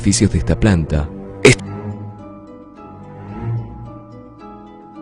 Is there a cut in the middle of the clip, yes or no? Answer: no